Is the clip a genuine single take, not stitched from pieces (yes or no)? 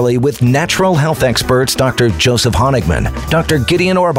yes